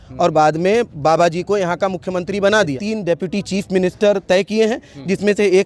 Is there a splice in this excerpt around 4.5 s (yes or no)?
no